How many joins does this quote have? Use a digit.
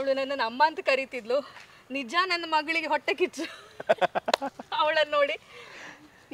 0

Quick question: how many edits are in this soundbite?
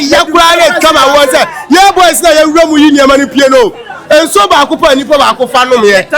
0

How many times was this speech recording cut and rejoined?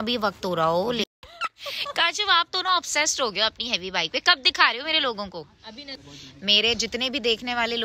2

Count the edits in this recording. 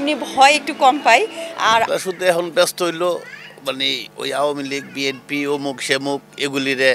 1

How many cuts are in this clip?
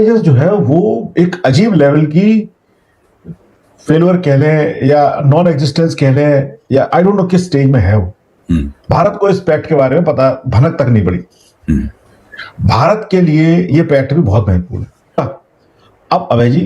1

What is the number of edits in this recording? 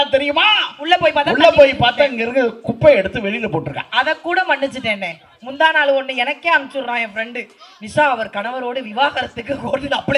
0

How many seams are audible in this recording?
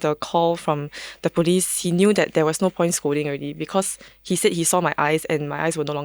1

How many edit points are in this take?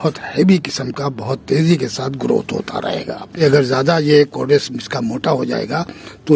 1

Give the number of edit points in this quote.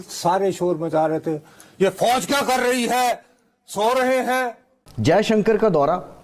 1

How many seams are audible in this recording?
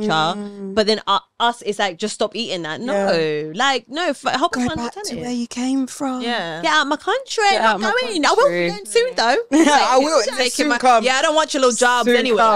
0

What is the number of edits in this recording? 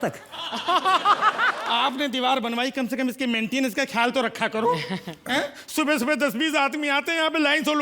1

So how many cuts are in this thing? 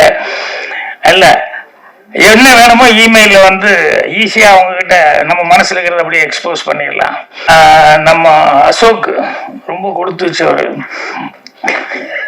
1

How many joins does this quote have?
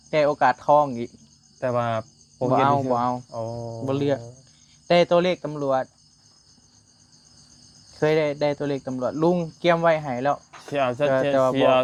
0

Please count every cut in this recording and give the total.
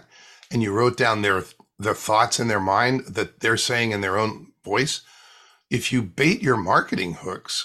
0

